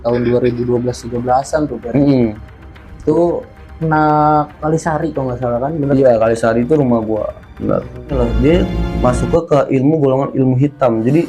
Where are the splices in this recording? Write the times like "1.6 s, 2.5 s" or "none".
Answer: 8.2 s